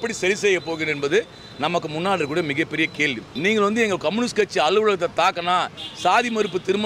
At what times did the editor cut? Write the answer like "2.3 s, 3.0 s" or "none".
3.2 s